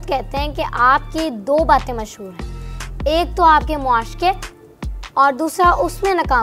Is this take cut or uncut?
uncut